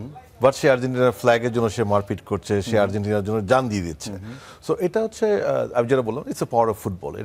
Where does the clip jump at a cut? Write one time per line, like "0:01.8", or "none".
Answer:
none